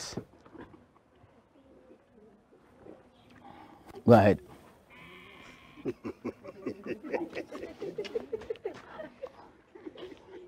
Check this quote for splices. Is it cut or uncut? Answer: uncut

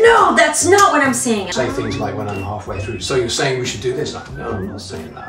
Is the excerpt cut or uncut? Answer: cut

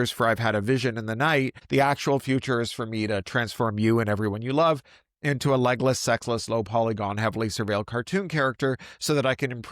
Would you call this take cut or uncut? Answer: cut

